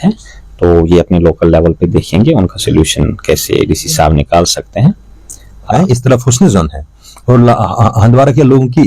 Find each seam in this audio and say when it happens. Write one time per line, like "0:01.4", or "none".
0:05.7